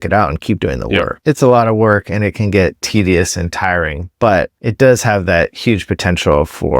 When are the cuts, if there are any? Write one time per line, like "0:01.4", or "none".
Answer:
0:01.1
0:02.8
0:04.6